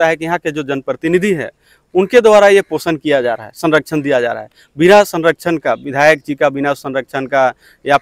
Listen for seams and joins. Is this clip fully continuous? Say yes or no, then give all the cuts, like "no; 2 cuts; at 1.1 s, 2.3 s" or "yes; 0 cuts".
yes; 0 cuts